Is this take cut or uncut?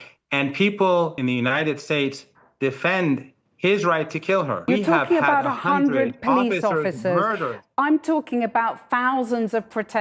cut